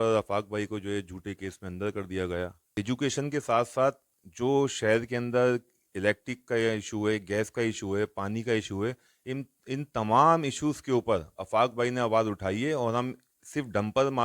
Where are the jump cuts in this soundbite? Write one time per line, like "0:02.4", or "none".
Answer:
0:02.6